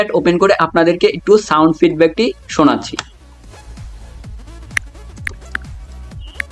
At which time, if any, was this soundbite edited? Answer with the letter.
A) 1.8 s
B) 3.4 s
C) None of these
B